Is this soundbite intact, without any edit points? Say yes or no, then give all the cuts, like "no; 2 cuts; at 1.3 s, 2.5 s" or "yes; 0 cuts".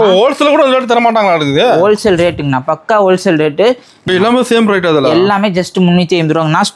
no; 1 cut; at 4.0 s